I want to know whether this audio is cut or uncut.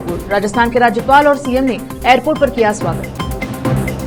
uncut